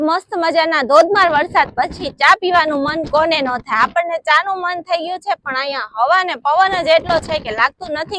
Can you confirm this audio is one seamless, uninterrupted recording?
yes; 0 cuts

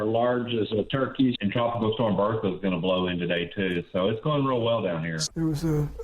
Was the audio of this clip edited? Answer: yes; 2 cuts; at 1.4 s, 5.2 s

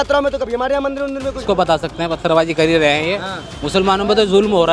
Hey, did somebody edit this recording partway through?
yes; 1 cut; at 1.4 s

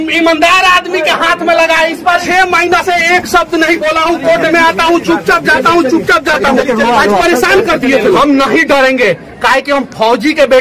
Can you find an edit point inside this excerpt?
yes; 2 cuts; at 2.2 s, 8.2 s

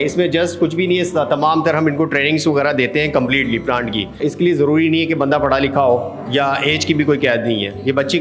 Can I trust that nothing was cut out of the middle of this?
no; 1 cut; at 4.2 s

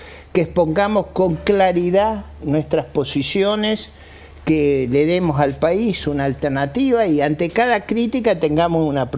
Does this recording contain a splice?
no; 0 cuts

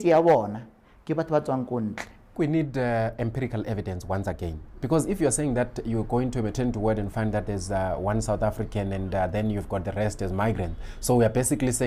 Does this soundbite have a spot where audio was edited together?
yes; 1 cut; at 2.3 s

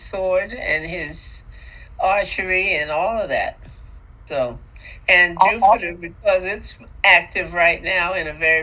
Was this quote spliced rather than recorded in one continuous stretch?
no; 0 cuts

